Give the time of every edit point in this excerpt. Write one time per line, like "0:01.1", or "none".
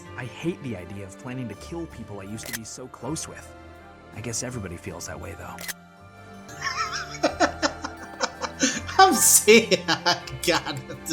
0:06.5